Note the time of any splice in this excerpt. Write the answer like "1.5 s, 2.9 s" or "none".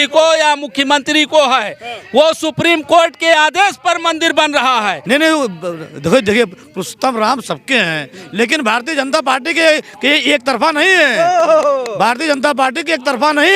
5.0 s